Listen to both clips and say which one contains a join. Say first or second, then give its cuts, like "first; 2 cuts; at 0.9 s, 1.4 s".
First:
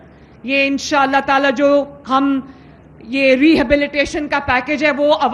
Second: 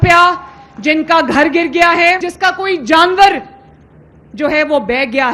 second; 1 cut; at 2.3 s